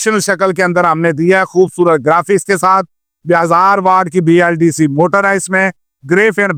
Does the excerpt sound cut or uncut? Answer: uncut